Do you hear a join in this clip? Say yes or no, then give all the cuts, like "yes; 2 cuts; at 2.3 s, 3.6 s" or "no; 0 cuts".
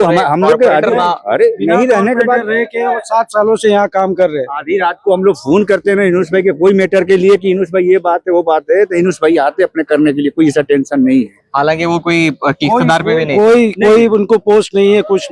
no; 0 cuts